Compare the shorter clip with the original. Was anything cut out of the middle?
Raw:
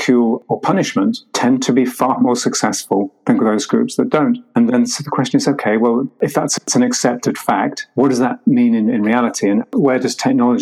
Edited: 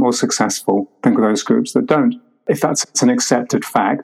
yes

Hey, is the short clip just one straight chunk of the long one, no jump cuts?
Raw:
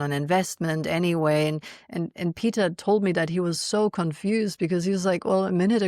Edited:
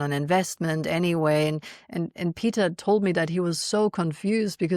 yes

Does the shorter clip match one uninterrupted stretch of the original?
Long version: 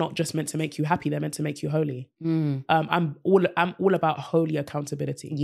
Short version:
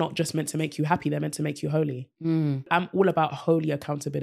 no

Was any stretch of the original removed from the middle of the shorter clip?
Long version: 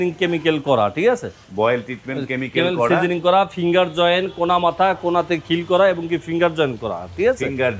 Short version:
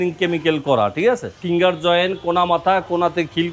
yes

